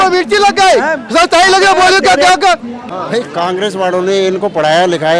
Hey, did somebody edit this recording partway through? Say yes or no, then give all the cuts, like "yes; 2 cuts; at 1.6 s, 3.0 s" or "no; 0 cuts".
yes; 1 cut; at 2.9 s